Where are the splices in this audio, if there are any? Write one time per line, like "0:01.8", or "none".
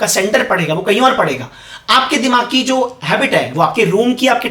none